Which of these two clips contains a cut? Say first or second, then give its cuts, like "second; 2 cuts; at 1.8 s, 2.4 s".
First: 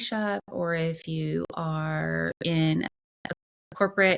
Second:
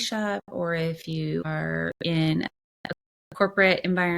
second; 1 cut; at 1.5 s